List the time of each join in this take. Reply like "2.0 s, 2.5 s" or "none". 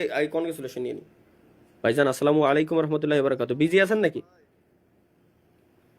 none